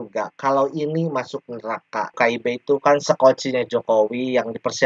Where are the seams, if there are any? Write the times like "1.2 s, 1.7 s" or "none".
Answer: 2.1 s